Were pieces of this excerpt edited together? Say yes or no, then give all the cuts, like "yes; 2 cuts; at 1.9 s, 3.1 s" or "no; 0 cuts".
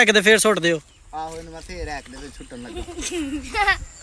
no; 0 cuts